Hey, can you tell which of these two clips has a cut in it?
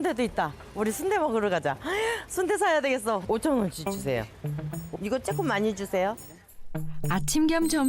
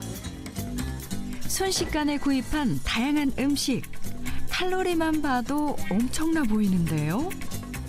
first; 1 cut; at 3.2 s

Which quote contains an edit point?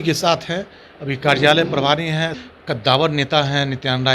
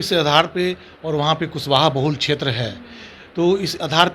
first; 1 cut; at 2.5 s

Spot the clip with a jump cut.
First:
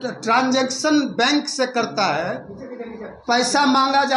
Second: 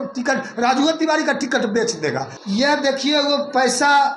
second; 1 cut; at 2.3 s

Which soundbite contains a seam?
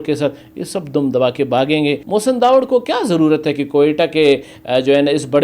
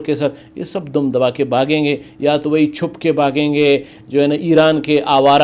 first; 1 cut; at 2.0 s

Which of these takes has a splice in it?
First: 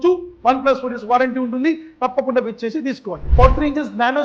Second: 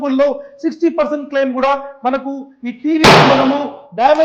first; 1 cut; at 3.2 s

